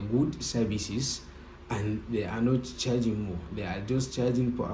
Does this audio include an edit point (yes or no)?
no